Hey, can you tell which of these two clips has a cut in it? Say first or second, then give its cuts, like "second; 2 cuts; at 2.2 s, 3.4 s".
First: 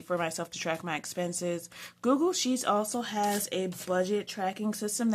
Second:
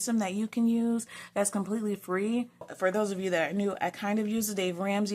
second; 1 cut; at 2.7 s